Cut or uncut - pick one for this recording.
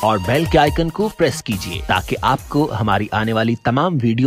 uncut